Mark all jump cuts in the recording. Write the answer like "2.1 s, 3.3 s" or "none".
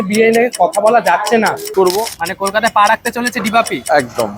1.6 s